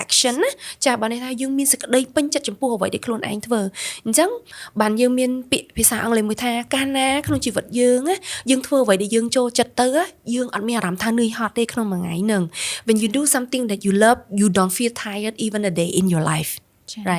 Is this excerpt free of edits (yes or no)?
yes